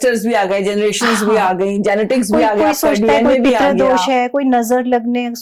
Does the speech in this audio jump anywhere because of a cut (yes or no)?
no